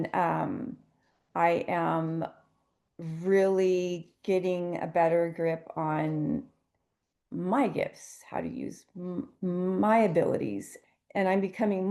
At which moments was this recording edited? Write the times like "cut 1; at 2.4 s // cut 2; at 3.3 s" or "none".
cut 1; at 10.7 s